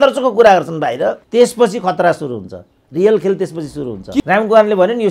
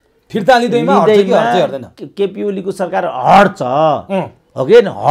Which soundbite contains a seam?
first; 2 cuts; at 1.2 s, 4.2 s

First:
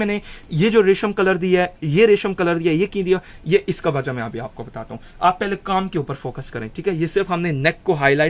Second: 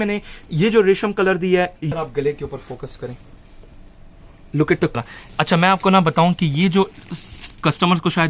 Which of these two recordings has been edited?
second; 2 cuts; at 1.8 s, 5.0 s

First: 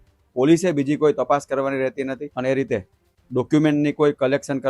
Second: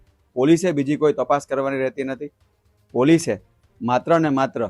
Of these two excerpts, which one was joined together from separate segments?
first; 1 cut; at 2.3 s

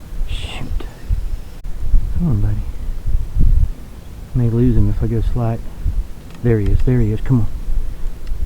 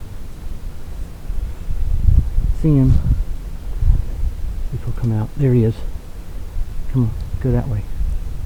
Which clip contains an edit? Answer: first; 1 cut; at 1.6 s

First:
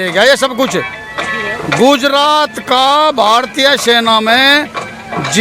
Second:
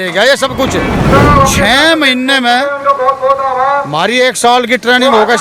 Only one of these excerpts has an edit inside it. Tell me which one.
second; 1 cut; at 1.1 s

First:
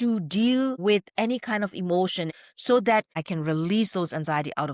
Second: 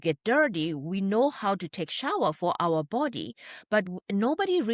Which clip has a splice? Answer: first; 2 cuts; at 2.4 s, 3.2 s

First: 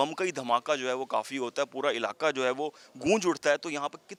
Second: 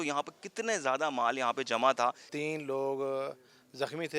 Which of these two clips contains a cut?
second; 1 cut; at 2.3 s

